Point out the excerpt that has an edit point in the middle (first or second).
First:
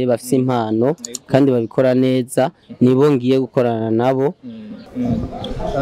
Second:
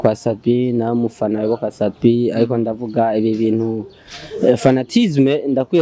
first